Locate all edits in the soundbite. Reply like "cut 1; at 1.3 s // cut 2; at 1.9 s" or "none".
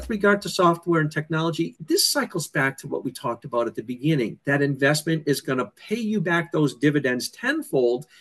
cut 1; at 1.7 s // cut 2; at 4.4 s

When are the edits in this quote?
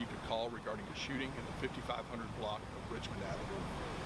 cut 1; at 2.0 s

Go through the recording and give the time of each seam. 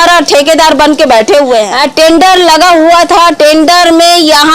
cut 1; at 1.7 s

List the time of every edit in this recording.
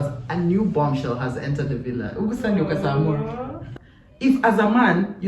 cut 1; at 3.6 s

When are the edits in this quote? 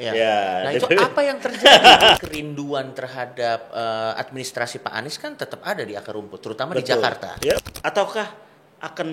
cut 1; at 2.2 s // cut 2; at 7.6 s

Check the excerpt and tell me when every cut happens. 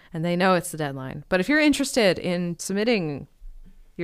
cut 1; at 2.6 s

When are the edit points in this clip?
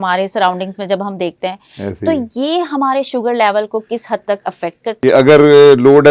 cut 1; at 4.9 s

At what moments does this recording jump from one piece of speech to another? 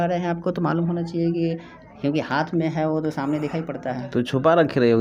none

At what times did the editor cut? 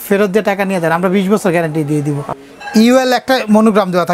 cut 1; at 2.3 s

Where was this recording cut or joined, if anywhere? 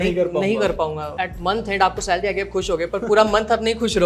cut 1; at 1.1 s

